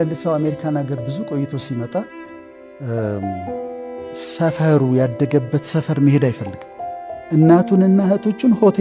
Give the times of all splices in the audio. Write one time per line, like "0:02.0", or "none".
none